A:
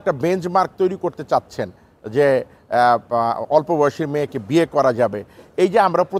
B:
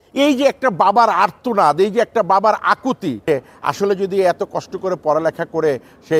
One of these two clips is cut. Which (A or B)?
B